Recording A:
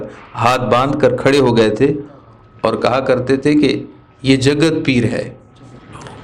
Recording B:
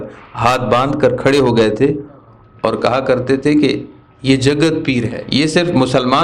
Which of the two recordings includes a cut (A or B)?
B